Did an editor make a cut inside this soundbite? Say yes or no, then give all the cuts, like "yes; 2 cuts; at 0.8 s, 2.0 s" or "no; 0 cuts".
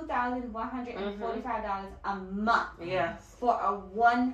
no; 0 cuts